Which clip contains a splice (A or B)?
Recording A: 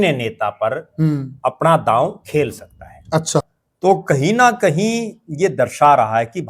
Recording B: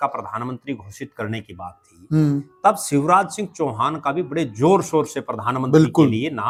A